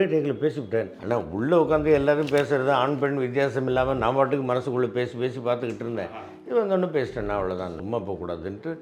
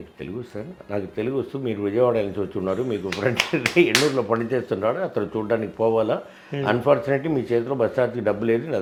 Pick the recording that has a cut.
first; 2 cuts; at 1.0 s, 7.7 s

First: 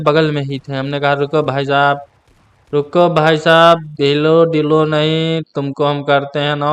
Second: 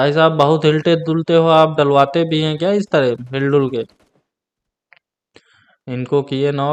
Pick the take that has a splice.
first; 1 cut; at 4.4 s

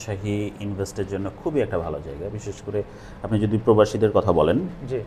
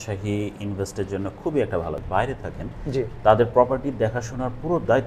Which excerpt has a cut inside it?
second; 1 cut; at 2.0 s

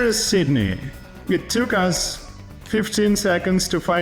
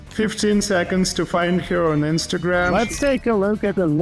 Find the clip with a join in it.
second; 1 cut; at 2.7 s

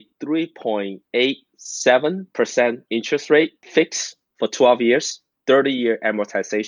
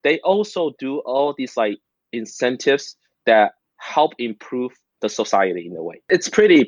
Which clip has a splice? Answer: first; 3 cuts; at 1.0 s, 2.2 s, 3.6 s

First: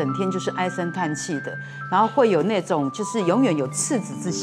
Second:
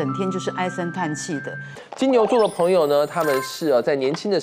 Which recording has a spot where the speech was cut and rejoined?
second; 1 cut; at 1.8 s

